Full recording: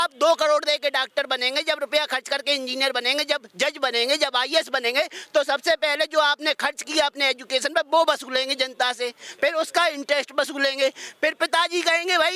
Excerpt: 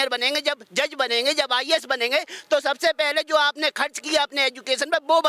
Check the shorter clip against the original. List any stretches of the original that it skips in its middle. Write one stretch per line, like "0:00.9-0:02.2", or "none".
none

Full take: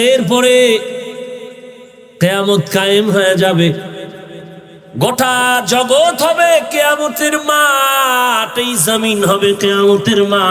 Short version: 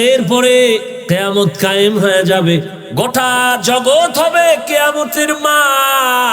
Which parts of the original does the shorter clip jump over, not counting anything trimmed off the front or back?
0:00.9-0:02.1
0:03.9-0:04.8

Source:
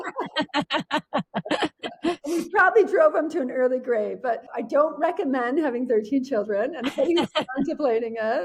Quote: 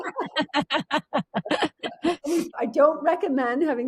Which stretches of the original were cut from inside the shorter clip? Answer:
0:02.5-0:04.4

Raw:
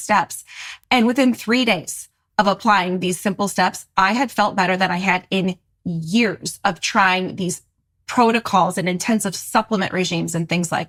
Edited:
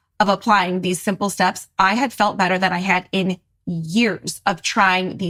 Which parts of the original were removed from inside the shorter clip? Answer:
none

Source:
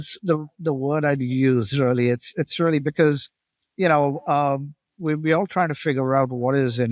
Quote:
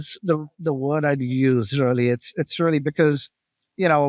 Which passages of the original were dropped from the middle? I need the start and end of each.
none

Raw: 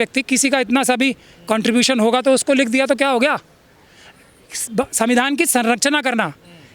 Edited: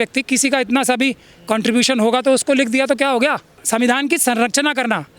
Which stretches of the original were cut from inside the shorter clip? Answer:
0:03.6-0:04.9

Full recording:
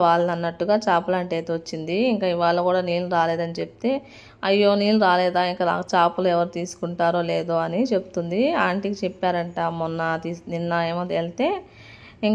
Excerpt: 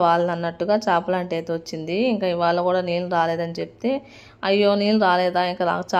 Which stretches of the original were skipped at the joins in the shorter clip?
none

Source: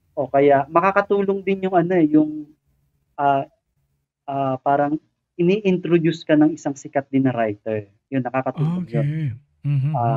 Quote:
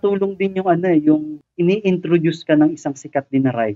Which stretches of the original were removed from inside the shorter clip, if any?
0:02.5-0:05.2

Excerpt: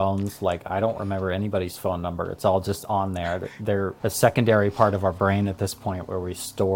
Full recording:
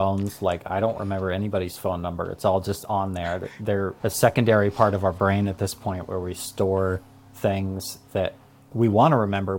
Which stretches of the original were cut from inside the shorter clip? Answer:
none

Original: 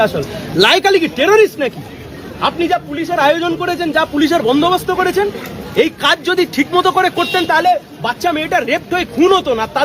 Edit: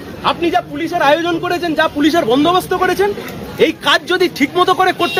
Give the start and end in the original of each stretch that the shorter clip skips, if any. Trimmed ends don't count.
none

